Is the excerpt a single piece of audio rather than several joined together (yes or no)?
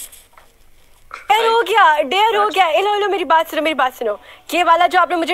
no